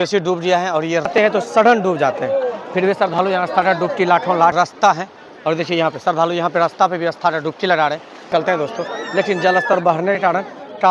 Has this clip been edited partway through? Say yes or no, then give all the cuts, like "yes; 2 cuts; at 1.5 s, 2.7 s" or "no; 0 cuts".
yes; 3 cuts; at 1.1 s, 4.5 s, 8.3 s